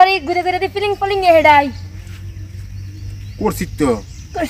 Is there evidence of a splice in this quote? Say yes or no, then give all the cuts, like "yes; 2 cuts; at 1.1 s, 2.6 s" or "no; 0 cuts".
no; 0 cuts